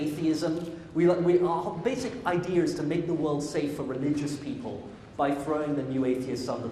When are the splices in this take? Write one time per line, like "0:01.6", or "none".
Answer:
0:02.7

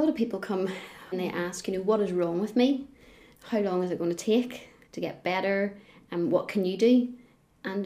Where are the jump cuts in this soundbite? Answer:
0:01.0

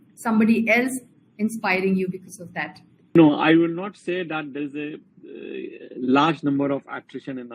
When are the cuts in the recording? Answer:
0:03.2

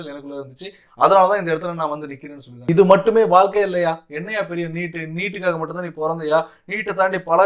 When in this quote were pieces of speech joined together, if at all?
0:02.6

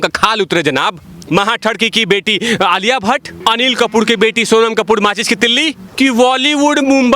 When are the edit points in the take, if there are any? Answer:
0:01.1
0:03.3
0:05.8

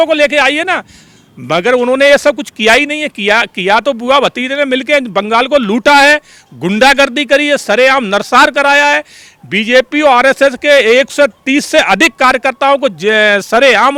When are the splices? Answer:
none

